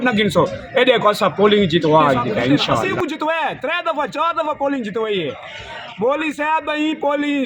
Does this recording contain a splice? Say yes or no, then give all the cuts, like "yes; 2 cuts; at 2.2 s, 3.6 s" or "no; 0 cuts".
yes; 1 cut; at 2.9 s